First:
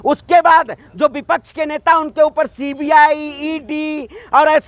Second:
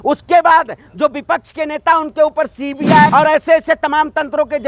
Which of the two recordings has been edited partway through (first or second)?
second